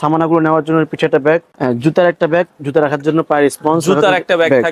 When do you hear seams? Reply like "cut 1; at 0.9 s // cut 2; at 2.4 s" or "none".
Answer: cut 1; at 1.5 s